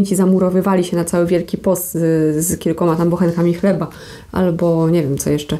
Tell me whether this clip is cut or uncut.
uncut